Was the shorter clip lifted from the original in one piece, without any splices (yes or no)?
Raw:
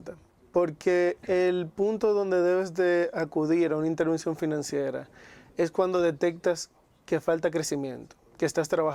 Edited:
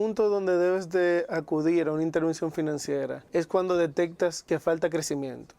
no